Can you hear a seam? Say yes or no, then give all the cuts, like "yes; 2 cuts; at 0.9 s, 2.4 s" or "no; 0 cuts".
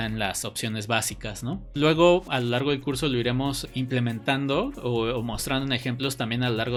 no; 0 cuts